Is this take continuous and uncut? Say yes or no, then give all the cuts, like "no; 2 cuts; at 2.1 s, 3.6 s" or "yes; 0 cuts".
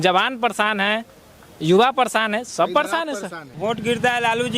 no; 1 cut; at 3.4 s